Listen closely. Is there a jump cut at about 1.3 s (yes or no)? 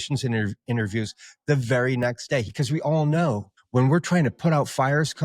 no